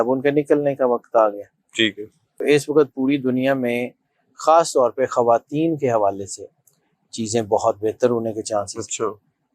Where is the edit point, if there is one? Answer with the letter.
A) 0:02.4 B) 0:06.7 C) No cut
A